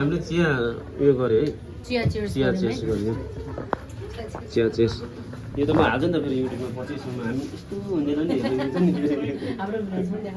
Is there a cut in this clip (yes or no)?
no